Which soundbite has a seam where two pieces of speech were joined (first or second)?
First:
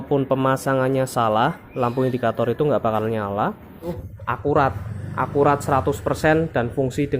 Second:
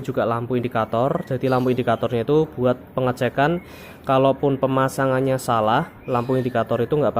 first